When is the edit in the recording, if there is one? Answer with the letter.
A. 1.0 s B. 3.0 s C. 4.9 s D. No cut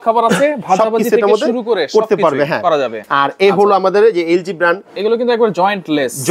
B